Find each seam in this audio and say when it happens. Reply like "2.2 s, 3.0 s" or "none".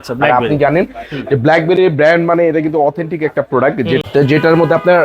4.0 s